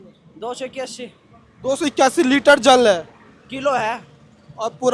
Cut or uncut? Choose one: uncut